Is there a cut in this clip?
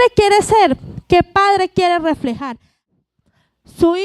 yes; 1 cut; at 2.9 s

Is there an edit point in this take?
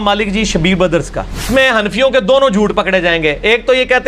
yes; 1 cut; at 1.5 s

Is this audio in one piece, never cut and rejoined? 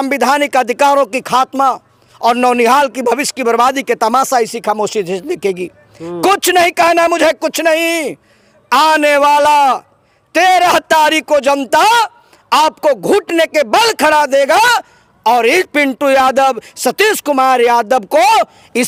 yes; 0 cuts

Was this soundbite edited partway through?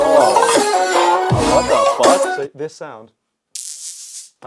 yes; 1 cut; at 2.3 s

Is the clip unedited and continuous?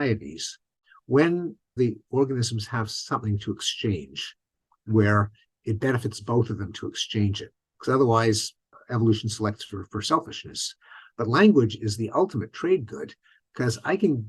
no; 1 cut; at 1.7 s

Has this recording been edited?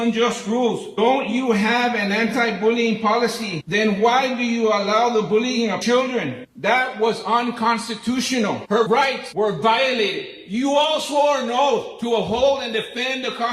yes; 3 cuts; at 0.9 s, 5.8 s, 8.8 s

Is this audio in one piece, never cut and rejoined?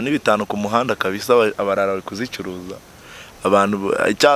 yes; 0 cuts

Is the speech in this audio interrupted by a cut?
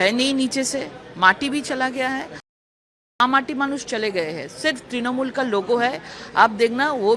yes; 1 cut; at 2.6 s

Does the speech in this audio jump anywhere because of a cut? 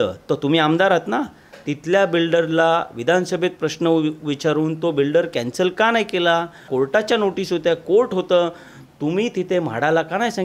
yes; 1 cut; at 6.7 s

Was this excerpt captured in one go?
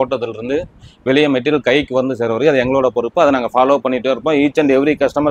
yes; 0 cuts

